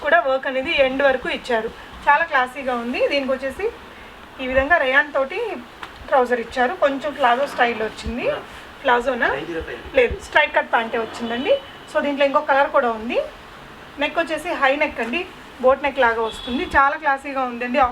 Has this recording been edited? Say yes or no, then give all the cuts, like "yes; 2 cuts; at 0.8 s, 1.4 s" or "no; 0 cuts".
no; 0 cuts